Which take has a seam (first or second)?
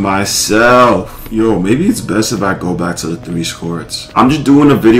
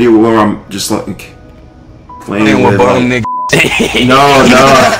first